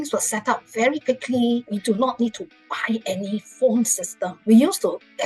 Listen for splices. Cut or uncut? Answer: cut